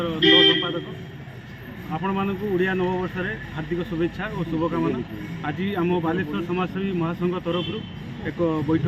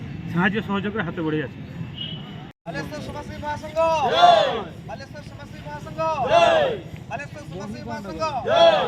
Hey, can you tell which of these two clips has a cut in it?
second; 1 cut; at 2.6 s

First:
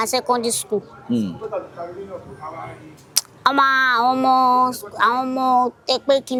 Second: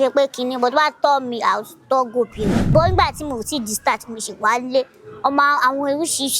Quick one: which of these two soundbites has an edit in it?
second; 1 cut; at 2.6 s

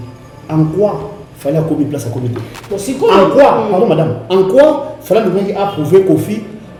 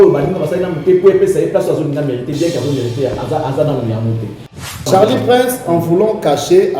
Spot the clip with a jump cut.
second; 1 cut; at 4.8 s

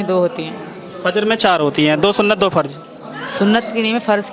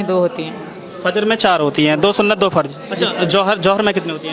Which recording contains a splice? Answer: second; 1 cut; at 2.8 s

